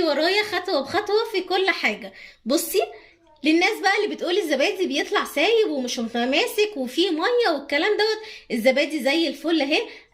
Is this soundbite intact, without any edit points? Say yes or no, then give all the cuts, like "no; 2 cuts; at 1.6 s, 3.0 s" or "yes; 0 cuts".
yes; 0 cuts